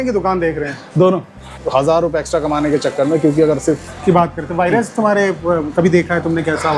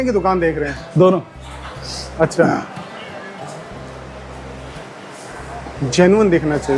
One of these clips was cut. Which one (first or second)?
first